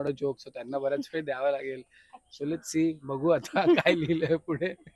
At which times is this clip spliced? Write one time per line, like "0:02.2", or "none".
none